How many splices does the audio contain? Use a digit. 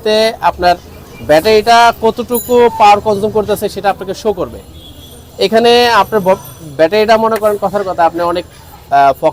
0